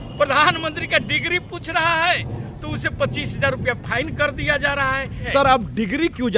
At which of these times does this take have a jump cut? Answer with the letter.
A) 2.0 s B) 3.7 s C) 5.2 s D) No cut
C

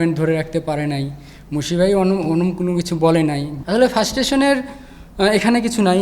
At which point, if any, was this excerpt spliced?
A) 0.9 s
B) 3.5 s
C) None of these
B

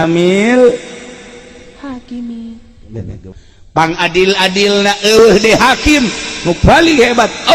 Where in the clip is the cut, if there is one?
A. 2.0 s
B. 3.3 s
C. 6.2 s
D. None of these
B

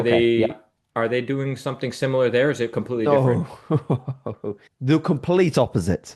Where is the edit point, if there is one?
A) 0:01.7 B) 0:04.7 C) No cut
B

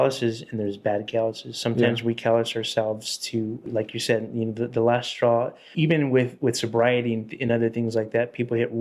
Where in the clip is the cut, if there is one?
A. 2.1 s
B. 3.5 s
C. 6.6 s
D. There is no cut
D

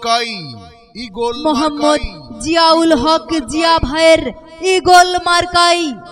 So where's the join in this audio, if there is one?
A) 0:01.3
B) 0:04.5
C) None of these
A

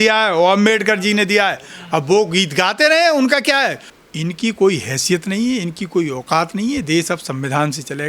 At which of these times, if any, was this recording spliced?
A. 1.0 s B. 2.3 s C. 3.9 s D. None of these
C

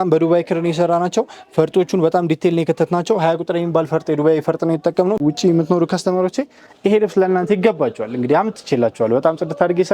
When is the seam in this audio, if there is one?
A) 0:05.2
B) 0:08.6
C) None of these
A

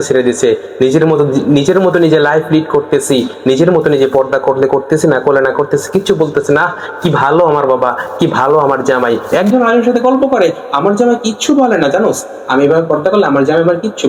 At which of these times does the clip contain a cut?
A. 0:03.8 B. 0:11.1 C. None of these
C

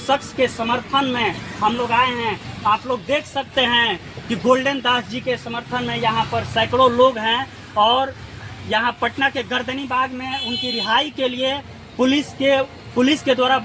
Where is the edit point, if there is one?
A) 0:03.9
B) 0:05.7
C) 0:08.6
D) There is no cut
D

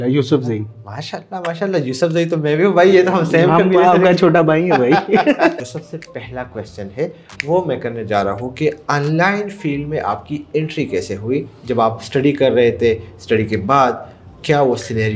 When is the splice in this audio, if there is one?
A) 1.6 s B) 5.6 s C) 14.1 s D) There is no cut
B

